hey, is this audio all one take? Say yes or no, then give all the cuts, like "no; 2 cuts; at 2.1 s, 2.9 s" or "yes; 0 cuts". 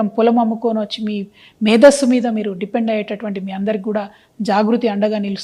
yes; 0 cuts